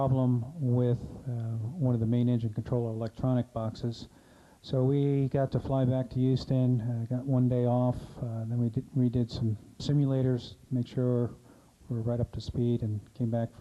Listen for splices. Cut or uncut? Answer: cut